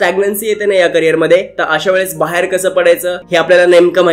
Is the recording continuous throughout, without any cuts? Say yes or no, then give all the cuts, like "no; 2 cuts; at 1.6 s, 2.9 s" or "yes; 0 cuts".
no; 1 cut; at 3.2 s